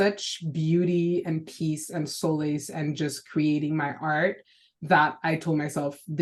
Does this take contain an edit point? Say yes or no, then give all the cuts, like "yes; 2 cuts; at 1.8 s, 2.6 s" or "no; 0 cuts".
no; 0 cuts